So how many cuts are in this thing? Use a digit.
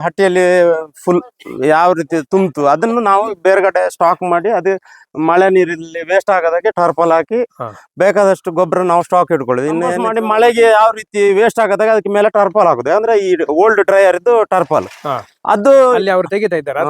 1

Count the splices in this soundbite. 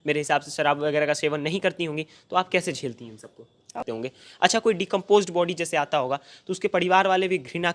1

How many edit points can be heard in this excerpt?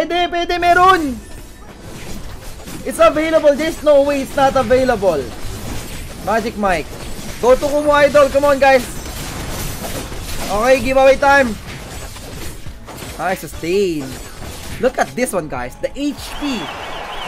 0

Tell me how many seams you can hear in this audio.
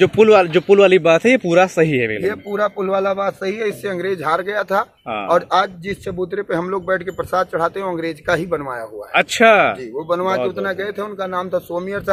0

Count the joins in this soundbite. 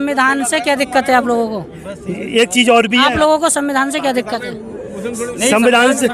0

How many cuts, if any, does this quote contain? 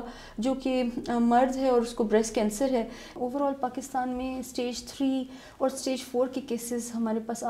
1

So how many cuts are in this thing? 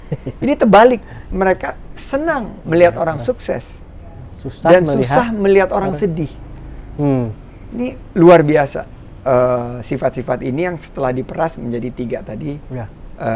0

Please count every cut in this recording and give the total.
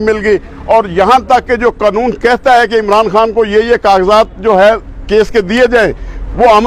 0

